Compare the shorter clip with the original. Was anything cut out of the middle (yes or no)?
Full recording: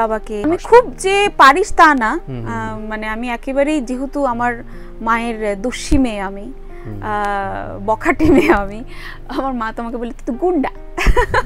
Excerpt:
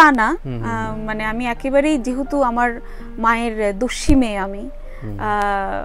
no